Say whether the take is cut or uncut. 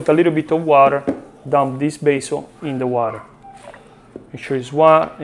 uncut